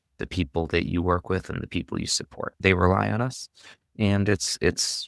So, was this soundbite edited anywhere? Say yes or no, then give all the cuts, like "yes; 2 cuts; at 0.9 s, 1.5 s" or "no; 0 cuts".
yes; 1 cut; at 2.5 s